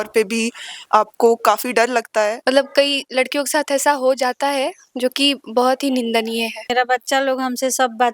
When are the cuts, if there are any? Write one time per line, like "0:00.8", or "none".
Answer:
0:02.4
0:06.7